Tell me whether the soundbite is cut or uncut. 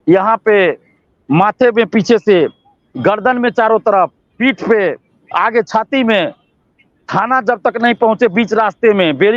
uncut